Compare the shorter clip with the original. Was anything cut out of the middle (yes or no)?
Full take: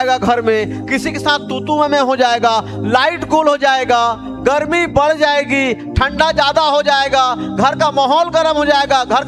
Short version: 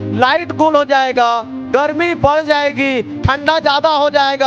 no